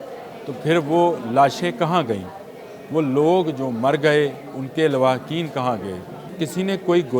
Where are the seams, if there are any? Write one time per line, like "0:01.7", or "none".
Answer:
0:06.2